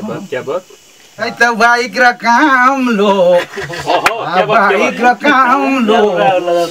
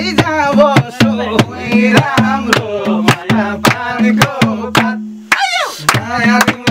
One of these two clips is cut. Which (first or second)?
first